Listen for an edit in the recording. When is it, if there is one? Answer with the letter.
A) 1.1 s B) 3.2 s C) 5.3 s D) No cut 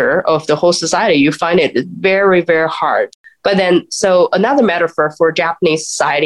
B